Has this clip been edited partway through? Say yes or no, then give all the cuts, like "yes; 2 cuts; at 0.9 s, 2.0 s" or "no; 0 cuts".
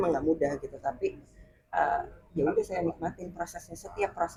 no; 0 cuts